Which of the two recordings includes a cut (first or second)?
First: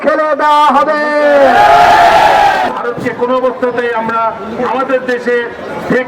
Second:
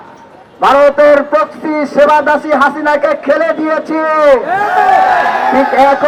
first